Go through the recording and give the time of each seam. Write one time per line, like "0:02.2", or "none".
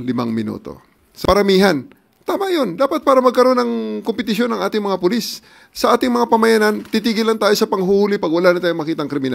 0:01.1

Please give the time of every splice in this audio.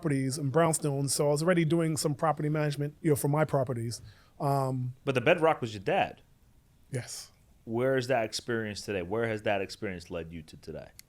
0:02.9
0:07.5

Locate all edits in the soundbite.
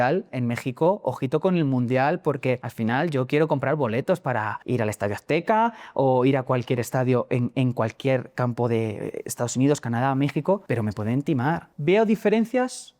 0:02.7
0:04.6
0:10.6
0:11.7

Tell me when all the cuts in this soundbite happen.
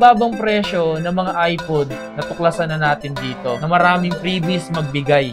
none

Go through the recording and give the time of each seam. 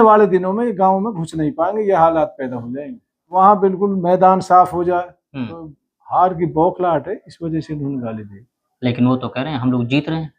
0:03.4

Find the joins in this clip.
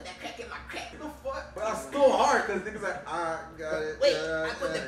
0:01.0

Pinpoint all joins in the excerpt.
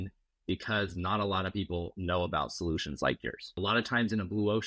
0:03.5

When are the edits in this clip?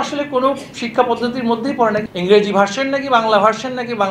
0:02.1

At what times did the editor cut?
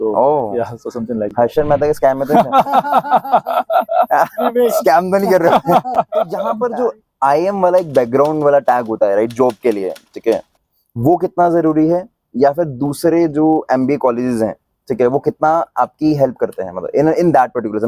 none

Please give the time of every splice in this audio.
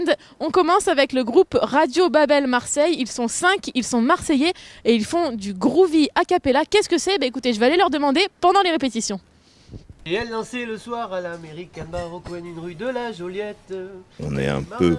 none

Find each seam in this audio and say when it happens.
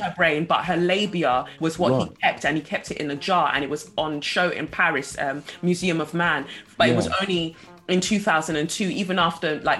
0:01.5
0:06.6

